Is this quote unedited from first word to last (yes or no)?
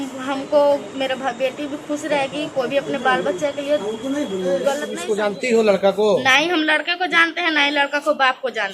no